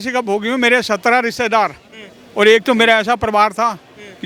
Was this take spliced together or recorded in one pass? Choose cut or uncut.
uncut